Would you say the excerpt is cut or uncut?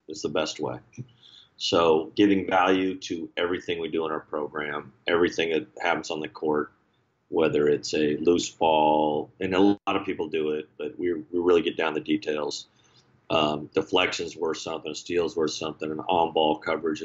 cut